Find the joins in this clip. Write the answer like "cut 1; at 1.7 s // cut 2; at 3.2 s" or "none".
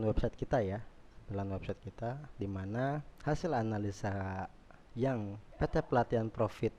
cut 1; at 3.1 s // cut 2; at 5.4 s